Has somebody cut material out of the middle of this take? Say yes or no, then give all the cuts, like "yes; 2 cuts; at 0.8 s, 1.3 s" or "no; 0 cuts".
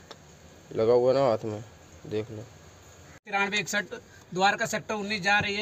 yes; 1 cut; at 3.3 s